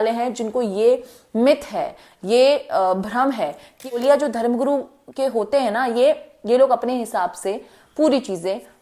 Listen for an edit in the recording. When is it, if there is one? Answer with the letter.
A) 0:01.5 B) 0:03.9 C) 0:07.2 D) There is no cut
B